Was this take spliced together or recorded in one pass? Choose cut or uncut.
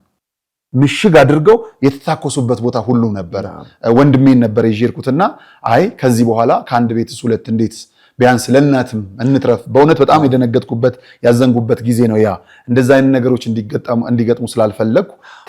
uncut